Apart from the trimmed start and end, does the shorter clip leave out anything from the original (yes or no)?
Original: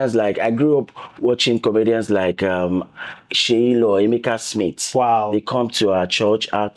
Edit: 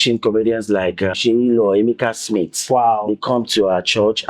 yes